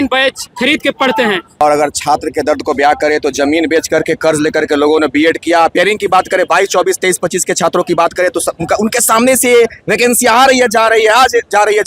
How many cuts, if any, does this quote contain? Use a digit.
1